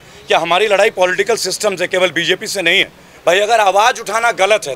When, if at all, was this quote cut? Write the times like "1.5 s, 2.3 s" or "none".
3.0 s